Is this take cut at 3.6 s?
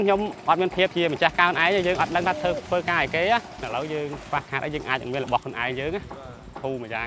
yes; 1 cut; at 3.6 s

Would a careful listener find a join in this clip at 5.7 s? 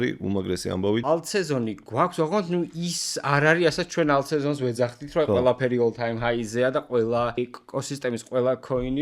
no; 2 cuts; at 1.0 s, 7.4 s

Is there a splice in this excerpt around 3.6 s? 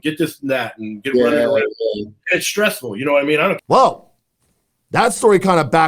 yes; 1 cut; at 3.6 s

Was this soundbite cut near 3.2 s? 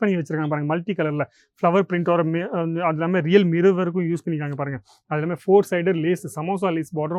no; 0 cuts

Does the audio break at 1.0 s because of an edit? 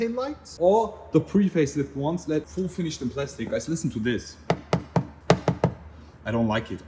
no; 2 cuts; at 2.4 s, 5.1 s

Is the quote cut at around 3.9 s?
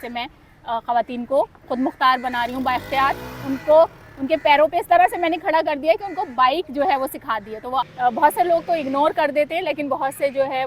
no; 1 cut; at 7.8 s

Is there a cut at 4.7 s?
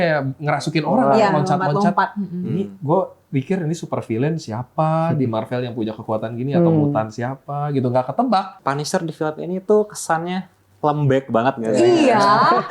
no; 1 cut; at 8.5 s

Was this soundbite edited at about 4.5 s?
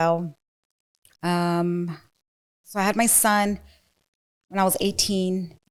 no; 0 cuts

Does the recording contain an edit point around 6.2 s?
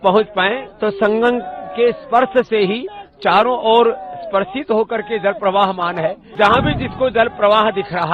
yes; 1 cut; at 6.2 s

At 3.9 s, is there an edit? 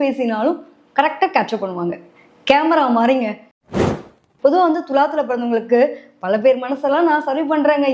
yes; 1 cut; at 3.9 s

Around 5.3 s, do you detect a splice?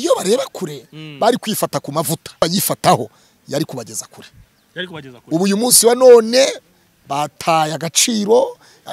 no; 1 cut; at 2.4 s

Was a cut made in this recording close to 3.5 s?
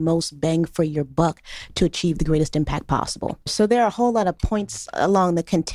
yes; 1 cut; at 3.5 s

